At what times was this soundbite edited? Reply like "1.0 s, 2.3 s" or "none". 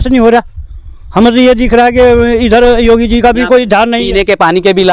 none